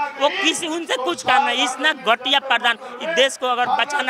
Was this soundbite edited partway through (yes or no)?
no